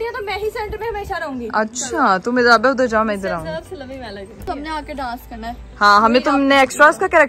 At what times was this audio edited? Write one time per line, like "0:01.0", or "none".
none